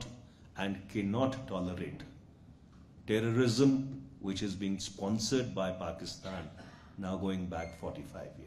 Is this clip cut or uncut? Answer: uncut